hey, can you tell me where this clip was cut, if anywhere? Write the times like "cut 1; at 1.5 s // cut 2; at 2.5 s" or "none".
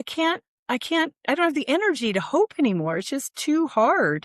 none